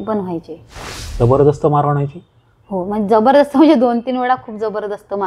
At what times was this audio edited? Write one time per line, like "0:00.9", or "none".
none